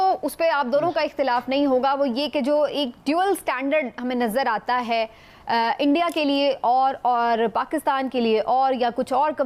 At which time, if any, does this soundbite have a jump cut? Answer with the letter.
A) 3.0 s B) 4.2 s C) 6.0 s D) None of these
D